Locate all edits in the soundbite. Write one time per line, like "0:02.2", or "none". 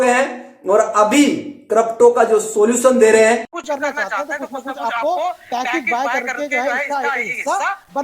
0:03.5
0:06.6